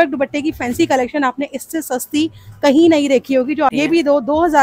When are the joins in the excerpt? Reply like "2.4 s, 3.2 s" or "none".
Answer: 3.7 s